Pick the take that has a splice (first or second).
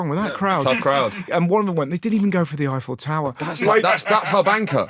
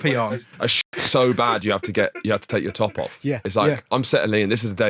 first